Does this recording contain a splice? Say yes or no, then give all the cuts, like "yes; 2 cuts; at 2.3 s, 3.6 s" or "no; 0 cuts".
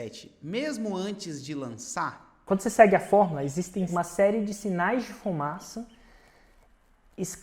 yes; 2 cuts; at 2.4 s, 3.9 s